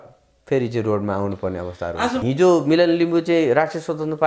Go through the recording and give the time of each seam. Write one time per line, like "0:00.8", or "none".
0:02.2